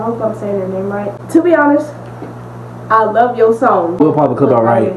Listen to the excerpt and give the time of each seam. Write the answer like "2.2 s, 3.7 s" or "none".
1.2 s, 4.0 s

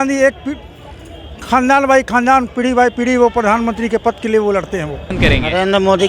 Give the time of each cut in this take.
5.1 s

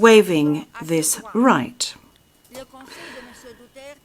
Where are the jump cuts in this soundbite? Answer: none

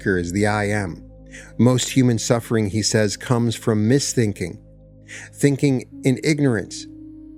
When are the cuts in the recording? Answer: none

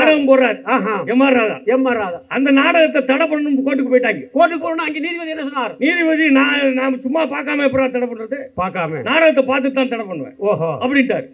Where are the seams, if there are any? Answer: none

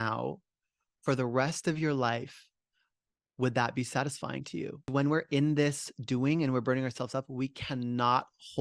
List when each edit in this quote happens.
4.9 s

